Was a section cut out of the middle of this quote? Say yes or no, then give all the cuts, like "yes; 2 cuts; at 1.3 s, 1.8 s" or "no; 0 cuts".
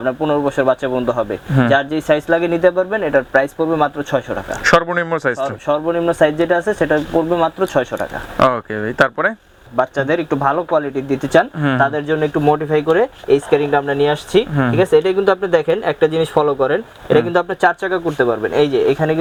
no; 0 cuts